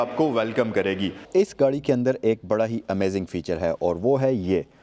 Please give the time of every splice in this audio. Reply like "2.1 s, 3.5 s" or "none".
1.3 s